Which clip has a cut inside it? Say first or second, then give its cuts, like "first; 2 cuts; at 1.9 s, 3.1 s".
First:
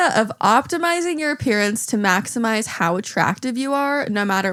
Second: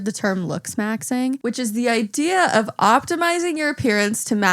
second; 1 cut; at 1.4 s